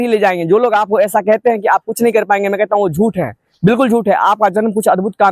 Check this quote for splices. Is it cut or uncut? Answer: uncut